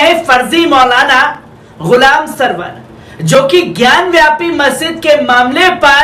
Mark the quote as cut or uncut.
uncut